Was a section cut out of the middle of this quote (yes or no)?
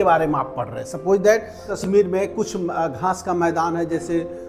yes